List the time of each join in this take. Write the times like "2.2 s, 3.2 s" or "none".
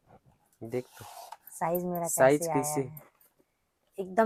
none